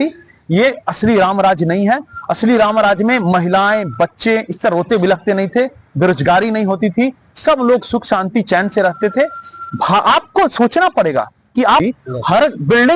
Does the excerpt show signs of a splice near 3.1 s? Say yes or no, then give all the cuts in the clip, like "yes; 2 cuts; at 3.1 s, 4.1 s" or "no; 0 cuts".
no; 1 cut; at 11.8 s